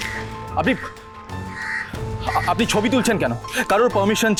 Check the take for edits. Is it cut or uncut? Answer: uncut